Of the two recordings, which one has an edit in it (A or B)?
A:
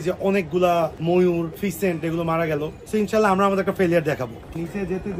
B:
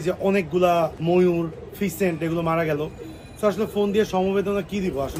A